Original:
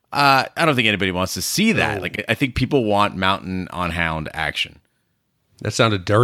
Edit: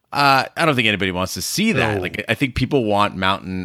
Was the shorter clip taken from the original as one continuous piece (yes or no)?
yes